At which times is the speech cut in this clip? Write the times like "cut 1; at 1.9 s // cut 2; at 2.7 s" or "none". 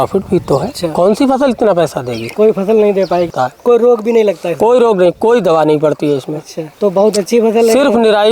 cut 1; at 3.3 s